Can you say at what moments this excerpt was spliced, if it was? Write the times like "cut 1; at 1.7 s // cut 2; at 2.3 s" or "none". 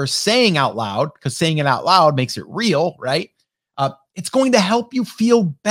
none